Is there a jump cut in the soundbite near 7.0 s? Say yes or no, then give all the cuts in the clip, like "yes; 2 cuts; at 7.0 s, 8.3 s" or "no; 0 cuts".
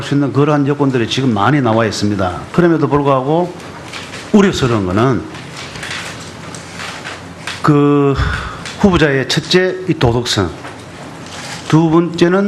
no; 1 cut; at 3.2 s